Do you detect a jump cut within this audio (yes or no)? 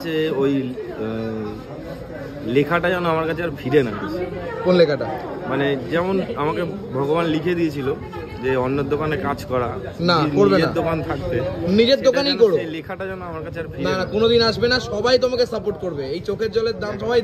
no